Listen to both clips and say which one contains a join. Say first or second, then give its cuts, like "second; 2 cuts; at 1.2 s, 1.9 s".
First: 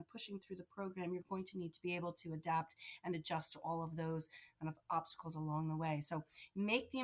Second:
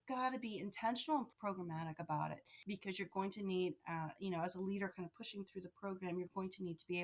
second; 2 cuts; at 1.3 s, 2.5 s